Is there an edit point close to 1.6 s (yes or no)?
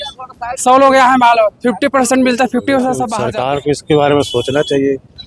no